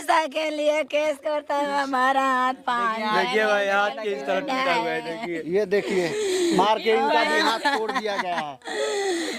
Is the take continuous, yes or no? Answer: yes